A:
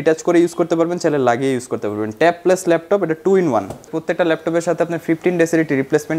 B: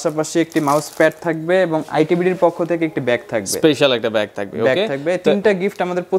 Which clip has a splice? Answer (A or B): A